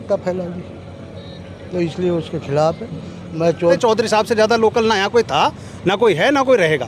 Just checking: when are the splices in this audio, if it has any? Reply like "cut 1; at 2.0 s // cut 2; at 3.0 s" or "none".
cut 1; at 3.8 s